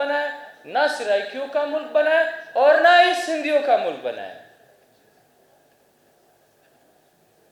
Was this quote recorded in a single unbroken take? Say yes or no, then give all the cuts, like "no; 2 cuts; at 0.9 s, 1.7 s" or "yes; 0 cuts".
yes; 0 cuts